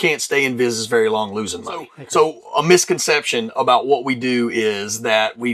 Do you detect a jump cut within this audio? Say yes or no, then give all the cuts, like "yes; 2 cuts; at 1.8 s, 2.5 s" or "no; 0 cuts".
yes; 1 cut; at 2.0 s